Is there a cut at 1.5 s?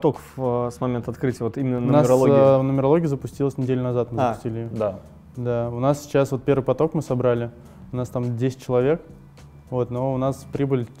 no; 0 cuts

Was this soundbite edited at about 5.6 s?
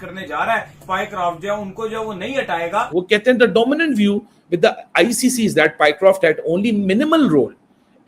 no; 2 cuts; at 0.8 s, 3.1 s

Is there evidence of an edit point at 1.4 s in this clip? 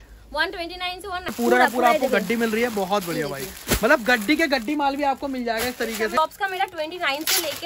yes; 2 cuts; at 1.4 s, 6.2 s

